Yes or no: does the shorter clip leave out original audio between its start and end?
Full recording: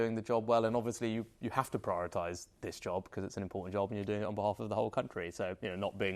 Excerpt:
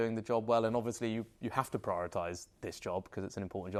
no